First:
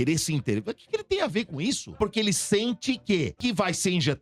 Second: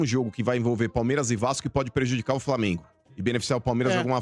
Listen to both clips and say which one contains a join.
first; 2 cuts; at 2.0 s, 3.4 s

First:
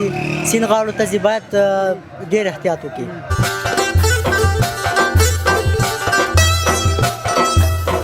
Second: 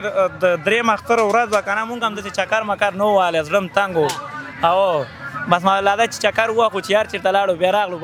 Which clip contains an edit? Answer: first; 1 cut; at 3.3 s

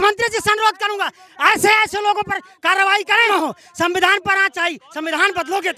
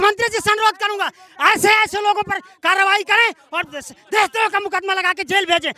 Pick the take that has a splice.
first; 1 cut; at 3.3 s

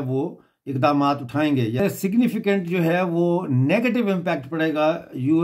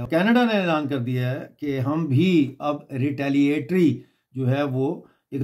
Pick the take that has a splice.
first; 1 cut; at 1.8 s

